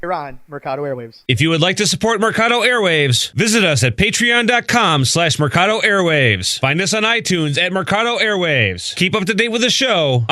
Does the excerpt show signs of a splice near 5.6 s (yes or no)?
no